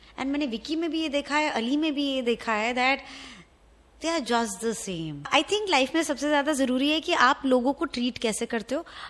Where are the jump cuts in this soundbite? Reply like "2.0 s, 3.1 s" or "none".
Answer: 5.3 s